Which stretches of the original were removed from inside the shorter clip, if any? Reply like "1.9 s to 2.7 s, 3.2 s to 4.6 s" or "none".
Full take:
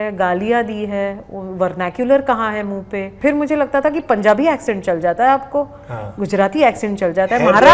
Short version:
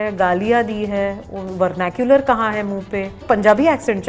3.2 s to 4.0 s